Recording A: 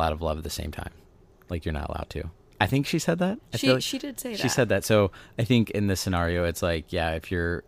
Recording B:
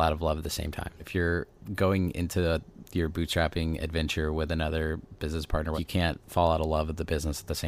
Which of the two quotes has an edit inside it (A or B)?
B